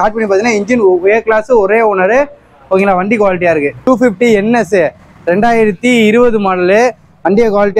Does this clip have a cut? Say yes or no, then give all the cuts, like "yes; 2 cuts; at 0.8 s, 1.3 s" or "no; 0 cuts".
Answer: yes; 1 cut; at 3.8 s